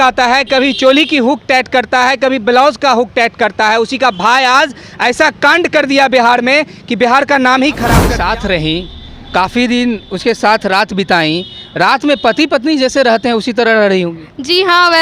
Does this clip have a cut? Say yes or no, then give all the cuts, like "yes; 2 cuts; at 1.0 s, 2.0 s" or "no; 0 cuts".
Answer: yes; 1 cut; at 8.1 s